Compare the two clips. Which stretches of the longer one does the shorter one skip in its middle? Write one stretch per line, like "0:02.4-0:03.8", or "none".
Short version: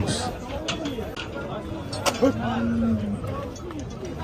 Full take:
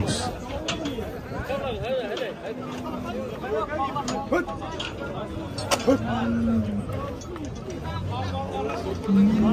0:01.2-0:04.9